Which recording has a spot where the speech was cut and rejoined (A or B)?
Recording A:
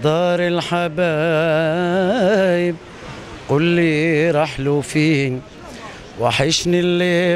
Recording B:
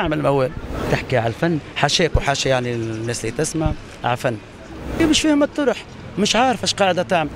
B